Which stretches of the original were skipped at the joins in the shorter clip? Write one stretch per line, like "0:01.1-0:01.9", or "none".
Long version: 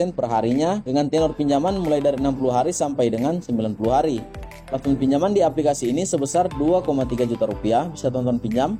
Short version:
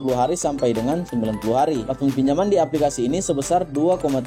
0:04.2-0:04.7